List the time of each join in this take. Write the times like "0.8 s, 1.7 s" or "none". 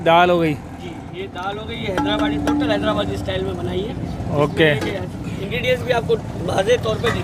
none